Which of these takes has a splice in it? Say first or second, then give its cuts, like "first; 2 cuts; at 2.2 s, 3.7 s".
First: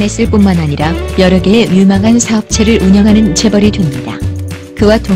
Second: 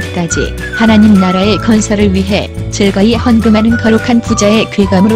first; 1 cut; at 1.0 s